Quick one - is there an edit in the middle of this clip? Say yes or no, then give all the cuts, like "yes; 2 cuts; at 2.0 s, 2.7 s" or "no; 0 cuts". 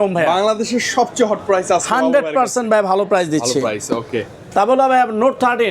no; 0 cuts